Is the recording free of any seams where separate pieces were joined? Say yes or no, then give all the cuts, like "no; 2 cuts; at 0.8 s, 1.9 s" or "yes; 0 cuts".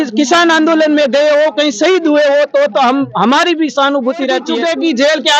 no; 1 cut; at 4.5 s